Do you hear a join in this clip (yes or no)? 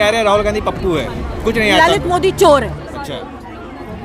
no